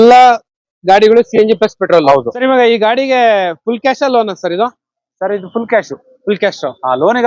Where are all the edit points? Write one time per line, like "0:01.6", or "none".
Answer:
0:02.3